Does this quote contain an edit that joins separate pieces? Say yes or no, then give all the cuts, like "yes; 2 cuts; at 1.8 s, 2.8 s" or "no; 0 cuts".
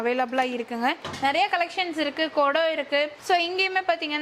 no; 0 cuts